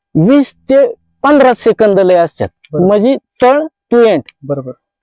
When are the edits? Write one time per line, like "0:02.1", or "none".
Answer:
none